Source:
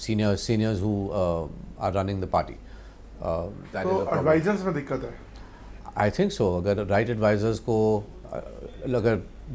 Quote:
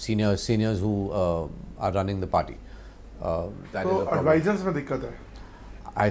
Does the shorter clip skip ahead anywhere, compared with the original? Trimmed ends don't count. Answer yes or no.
no